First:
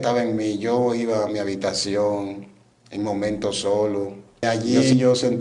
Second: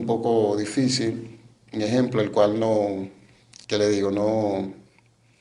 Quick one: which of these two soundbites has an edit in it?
first; 1 cut; at 4.4 s

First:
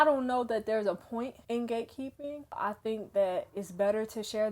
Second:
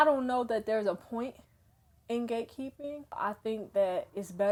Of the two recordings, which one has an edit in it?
first; 1 cut; at 1.4 s

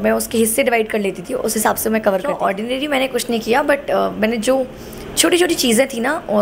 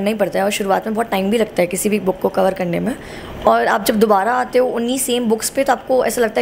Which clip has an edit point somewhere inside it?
first; 1 cut; at 2.4 s

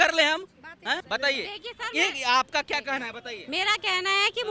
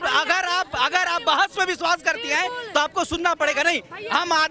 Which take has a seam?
first; 1 cut; at 1.0 s

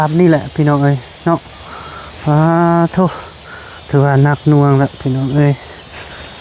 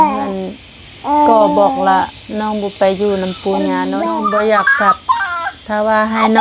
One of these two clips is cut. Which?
second; 1 cut; at 4.0 s

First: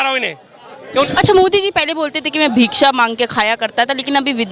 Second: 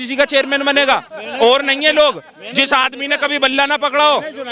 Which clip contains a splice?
first; 1 cut; at 1.1 s

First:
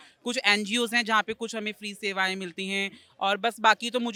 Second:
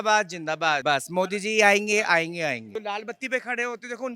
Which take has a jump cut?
second; 2 cuts; at 0.8 s, 2.7 s

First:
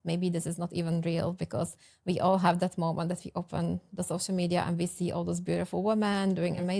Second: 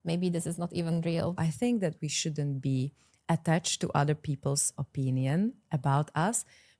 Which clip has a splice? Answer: second; 1 cut; at 1.4 s

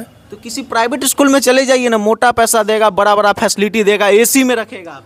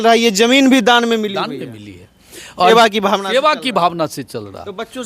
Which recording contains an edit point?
second; 1 cut; at 2.7 s

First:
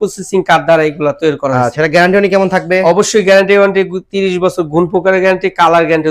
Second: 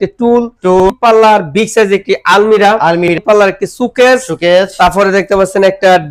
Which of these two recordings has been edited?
second; 2 cuts; at 0.9 s, 3.1 s

